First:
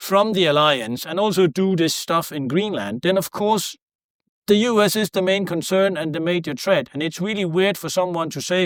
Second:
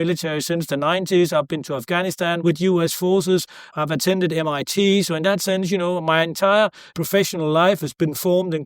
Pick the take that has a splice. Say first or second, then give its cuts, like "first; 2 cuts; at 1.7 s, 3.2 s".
second; 3 cuts; at 2.4 s, 3.7 s, 6.9 s